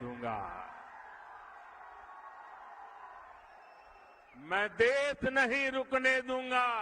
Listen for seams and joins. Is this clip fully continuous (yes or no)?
yes